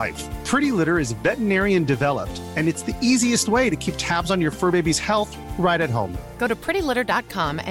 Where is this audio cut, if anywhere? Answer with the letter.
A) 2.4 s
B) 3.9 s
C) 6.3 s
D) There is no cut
D